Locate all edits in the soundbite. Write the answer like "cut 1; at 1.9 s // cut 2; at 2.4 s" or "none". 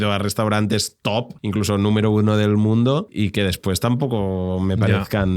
cut 1; at 1.4 s // cut 2; at 3.1 s